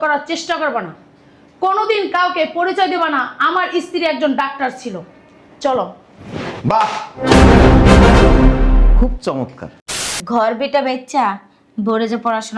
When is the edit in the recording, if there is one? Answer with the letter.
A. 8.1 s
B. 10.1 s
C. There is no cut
B